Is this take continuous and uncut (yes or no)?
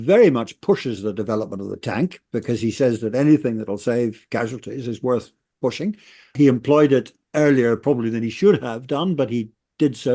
no